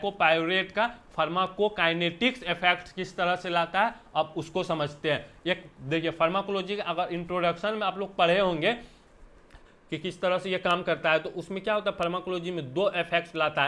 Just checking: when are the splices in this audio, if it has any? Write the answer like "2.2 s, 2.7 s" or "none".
none